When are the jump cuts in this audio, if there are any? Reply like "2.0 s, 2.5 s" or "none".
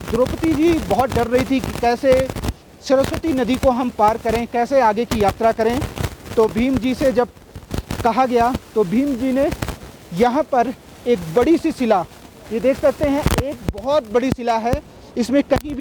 none